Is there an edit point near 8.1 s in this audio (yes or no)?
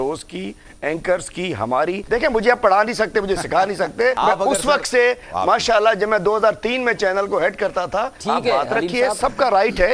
yes